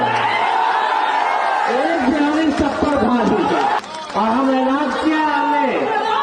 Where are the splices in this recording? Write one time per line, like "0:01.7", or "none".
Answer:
0:03.8